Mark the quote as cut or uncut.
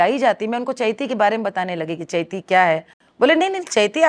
uncut